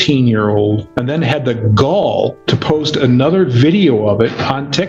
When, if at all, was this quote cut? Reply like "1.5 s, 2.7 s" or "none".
0.9 s, 2.1 s